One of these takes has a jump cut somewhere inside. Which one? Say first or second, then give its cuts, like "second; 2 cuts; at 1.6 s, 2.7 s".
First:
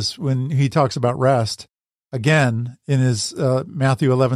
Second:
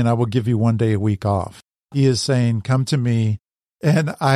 second; 1 cut; at 1.5 s